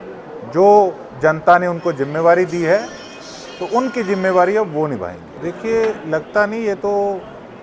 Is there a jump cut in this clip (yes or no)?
yes